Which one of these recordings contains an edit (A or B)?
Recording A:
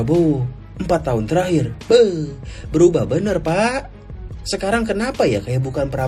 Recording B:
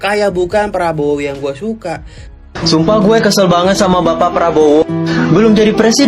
B